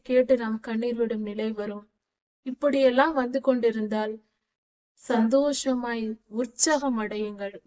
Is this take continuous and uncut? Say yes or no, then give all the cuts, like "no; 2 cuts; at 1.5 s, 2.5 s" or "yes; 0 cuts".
yes; 0 cuts